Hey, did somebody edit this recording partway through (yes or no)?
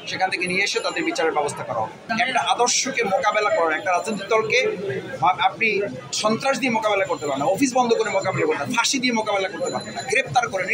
yes